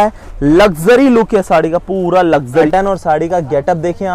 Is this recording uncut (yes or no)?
no